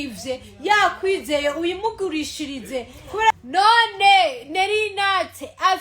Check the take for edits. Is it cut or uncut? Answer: cut